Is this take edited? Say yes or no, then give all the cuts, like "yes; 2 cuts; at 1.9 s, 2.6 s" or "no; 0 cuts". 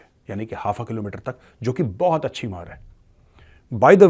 no; 0 cuts